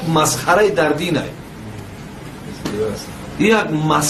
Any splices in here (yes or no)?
no